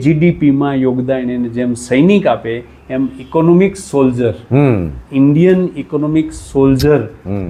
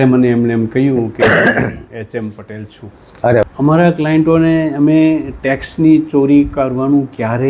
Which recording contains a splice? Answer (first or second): second